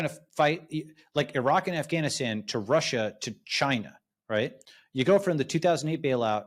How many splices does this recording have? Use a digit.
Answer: 0